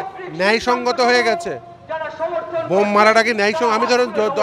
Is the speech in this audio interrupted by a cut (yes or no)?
no